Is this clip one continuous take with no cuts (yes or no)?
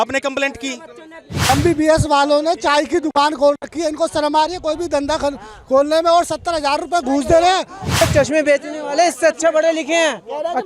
no